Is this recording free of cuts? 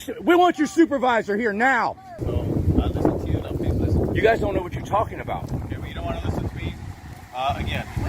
no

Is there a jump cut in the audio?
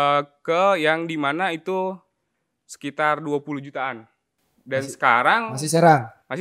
no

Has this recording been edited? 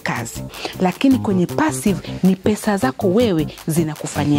no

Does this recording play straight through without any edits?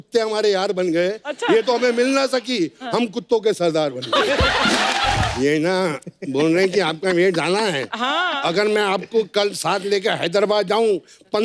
no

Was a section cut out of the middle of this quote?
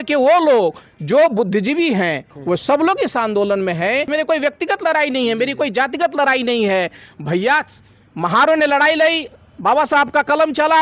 yes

